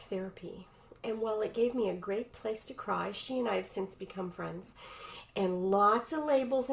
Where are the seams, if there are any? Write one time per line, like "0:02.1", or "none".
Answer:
none